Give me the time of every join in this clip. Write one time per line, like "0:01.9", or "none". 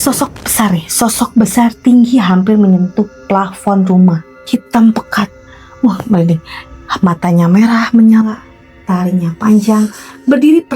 0:04.3